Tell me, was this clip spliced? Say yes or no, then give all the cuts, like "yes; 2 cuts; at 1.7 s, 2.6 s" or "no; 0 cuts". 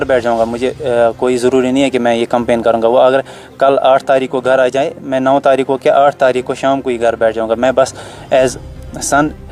no; 0 cuts